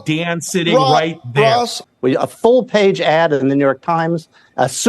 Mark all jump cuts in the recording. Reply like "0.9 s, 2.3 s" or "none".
1.8 s